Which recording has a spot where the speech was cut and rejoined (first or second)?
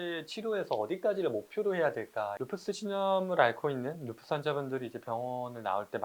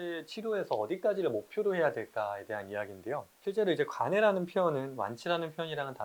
first